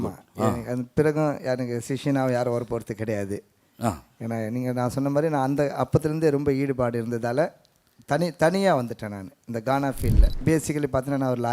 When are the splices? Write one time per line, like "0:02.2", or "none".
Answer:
0:10.4